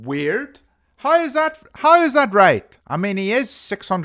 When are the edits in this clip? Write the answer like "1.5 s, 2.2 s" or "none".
2.8 s